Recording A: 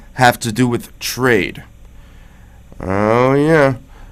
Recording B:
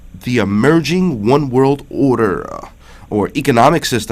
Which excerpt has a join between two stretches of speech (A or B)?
B